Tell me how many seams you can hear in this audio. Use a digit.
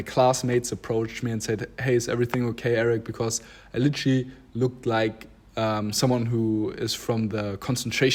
0